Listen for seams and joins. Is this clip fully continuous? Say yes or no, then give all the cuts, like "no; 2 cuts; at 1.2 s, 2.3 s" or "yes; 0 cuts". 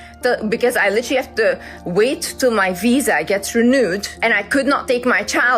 no; 1 cut; at 4.1 s